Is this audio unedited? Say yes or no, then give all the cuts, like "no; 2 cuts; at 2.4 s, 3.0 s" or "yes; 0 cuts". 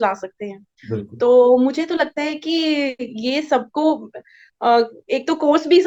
yes; 0 cuts